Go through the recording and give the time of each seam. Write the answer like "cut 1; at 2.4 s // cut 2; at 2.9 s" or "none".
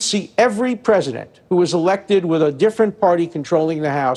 none